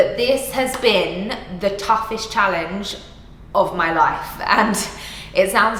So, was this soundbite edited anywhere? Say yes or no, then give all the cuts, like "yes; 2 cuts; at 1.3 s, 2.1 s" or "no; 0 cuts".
no; 0 cuts